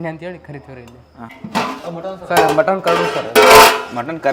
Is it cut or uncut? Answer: cut